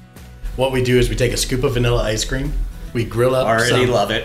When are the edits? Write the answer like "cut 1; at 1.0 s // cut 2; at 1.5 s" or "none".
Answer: none